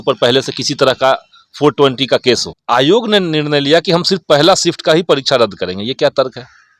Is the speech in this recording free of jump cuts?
no; 1 cut; at 2.5 s

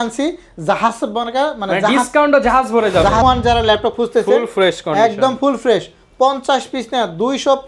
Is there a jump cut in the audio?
yes; 1 cut; at 3.2 s

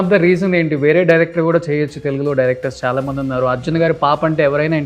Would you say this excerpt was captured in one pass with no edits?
yes; 0 cuts

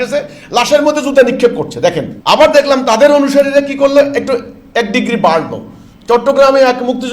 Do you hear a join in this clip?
yes; 1 cut; at 2.1 s

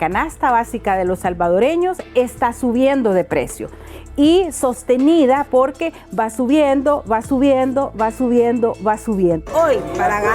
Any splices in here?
yes; 1 cut; at 9.4 s

